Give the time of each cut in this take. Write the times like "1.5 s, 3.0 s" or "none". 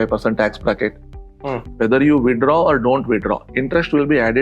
1.6 s